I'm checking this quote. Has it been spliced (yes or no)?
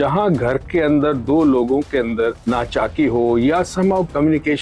yes